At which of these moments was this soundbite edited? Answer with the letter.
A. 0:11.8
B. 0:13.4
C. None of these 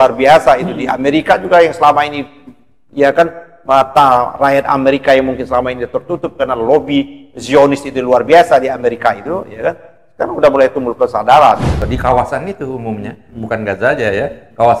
A